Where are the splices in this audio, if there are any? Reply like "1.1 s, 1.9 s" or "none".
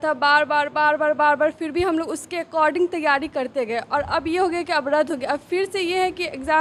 none